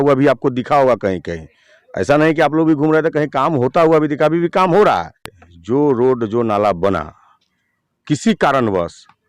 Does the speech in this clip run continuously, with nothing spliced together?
yes; 0 cuts

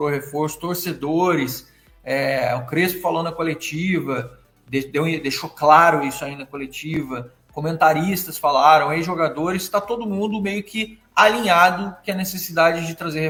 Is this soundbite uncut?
yes; 0 cuts

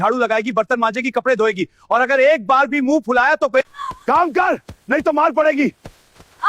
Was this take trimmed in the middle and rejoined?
yes; 1 cut; at 3.7 s

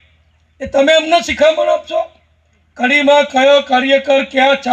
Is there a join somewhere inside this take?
no; 0 cuts

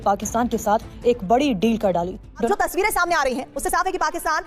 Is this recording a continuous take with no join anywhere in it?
no; 1 cut; at 2.5 s

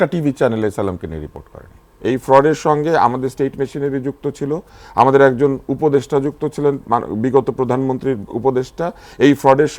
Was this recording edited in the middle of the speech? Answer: yes; 1 cut; at 1.9 s

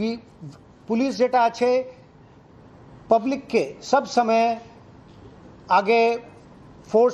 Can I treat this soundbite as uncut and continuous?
yes; 0 cuts

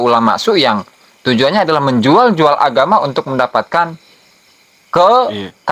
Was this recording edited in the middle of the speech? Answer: no; 0 cuts

